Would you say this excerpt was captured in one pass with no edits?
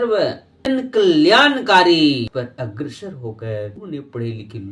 no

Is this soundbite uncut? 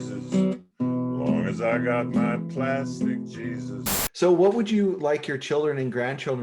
no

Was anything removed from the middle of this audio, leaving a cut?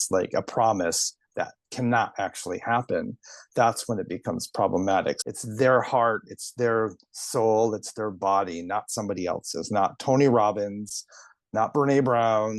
yes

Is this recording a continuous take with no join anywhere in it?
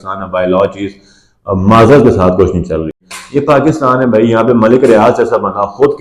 no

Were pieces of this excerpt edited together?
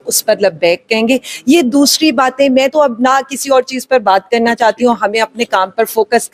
no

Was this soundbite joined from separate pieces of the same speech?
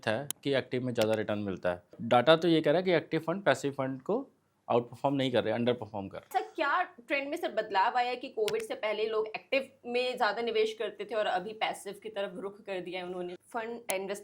yes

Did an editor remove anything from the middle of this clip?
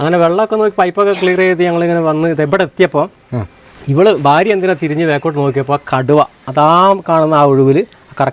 no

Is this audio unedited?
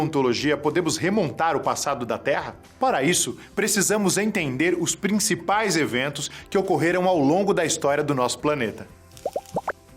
no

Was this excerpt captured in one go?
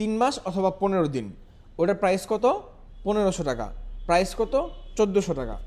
yes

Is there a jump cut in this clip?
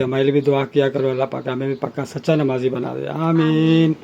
no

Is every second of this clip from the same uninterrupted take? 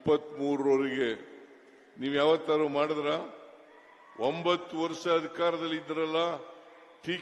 yes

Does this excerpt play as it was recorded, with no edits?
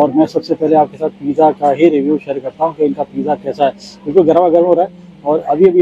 yes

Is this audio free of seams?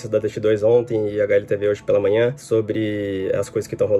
yes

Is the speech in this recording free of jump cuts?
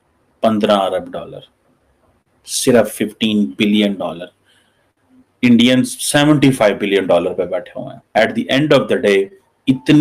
no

